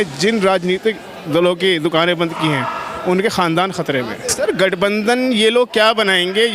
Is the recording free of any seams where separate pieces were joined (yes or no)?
no